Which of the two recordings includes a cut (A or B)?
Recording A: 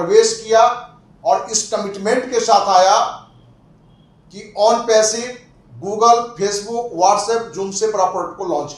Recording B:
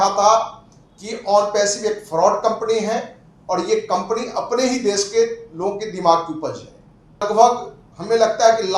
B